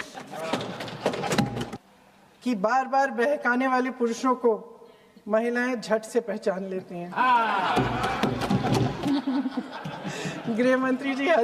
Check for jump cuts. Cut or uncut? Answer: cut